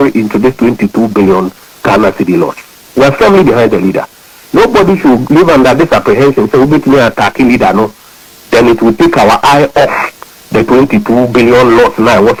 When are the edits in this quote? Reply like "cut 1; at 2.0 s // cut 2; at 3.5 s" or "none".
none